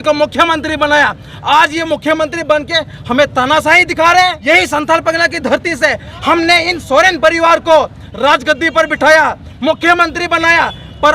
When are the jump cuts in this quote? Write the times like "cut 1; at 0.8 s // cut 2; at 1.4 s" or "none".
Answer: cut 1; at 4.4 s

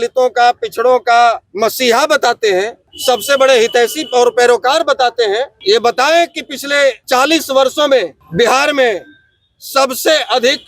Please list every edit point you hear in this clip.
cut 1; at 1.5 s // cut 2; at 2.9 s // cut 3; at 5.6 s // cut 4; at 7.0 s // cut 5; at 8.2 s

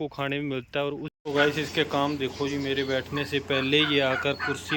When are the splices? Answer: cut 1; at 1.1 s

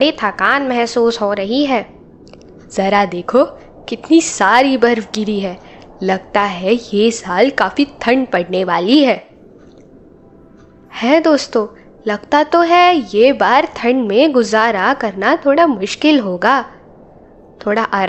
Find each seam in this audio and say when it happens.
none

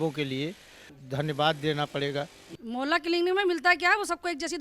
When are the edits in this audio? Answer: cut 1; at 0.9 s // cut 2; at 2.5 s

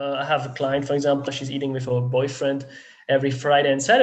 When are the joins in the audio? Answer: cut 1; at 1.3 s

